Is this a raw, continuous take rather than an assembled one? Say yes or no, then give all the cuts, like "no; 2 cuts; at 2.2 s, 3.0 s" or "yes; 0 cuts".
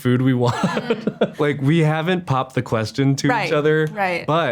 no; 1 cut; at 1.3 s